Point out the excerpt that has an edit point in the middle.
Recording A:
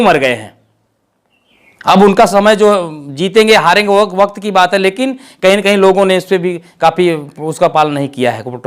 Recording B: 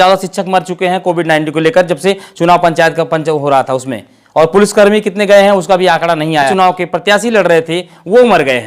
B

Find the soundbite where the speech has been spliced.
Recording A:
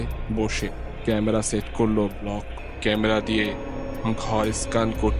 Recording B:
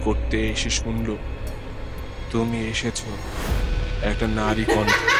A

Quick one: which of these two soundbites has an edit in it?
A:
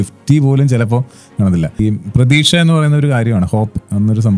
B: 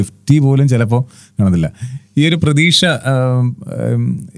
A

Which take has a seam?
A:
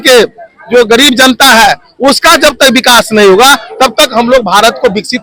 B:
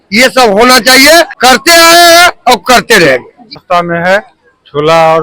B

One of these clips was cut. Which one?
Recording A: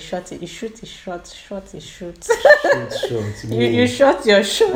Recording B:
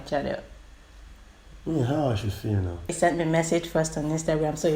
B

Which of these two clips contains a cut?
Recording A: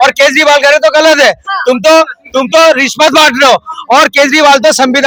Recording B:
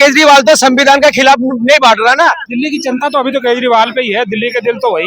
B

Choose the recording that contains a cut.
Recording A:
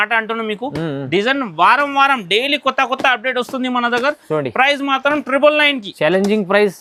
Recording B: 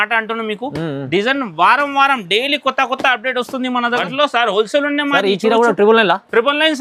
B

